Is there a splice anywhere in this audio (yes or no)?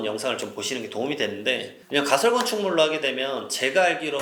no